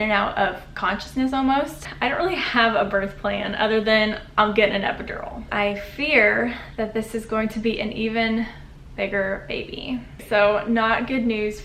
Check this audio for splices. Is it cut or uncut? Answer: cut